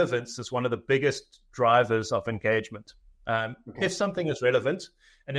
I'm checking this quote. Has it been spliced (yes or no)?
no